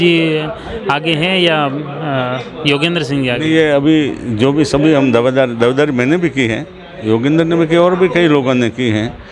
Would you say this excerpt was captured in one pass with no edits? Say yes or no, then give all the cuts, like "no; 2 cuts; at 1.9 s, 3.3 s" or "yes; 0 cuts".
yes; 0 cuts